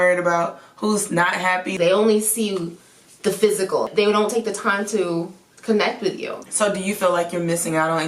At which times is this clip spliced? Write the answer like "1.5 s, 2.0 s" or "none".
1.7 s, 3.9 s, 6.4 s